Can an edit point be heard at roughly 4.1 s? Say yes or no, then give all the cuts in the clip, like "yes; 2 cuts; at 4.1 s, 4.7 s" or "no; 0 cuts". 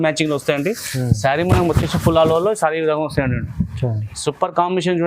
no; 0 cuts